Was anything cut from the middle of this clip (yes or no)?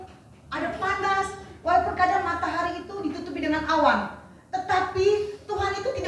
no